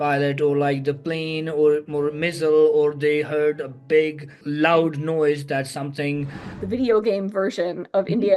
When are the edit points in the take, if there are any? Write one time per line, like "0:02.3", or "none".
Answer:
0:04.4
0:06.5